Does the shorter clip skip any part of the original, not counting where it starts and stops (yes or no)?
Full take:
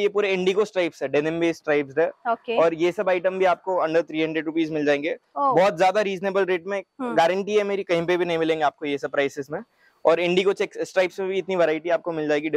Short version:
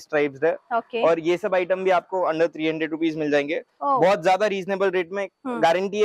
no